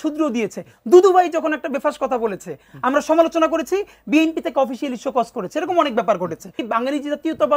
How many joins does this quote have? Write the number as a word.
one